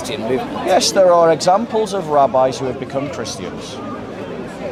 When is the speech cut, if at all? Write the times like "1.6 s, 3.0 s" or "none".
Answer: none